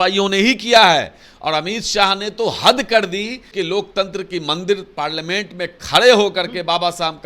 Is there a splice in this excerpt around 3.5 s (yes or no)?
yes